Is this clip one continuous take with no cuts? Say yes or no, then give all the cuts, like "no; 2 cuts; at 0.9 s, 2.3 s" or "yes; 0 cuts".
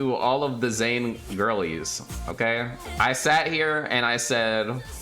no; 1 cut; at 2.8 s